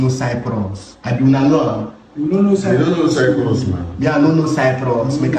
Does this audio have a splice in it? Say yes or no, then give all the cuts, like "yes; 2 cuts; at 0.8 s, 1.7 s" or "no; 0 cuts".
no; 0 cuts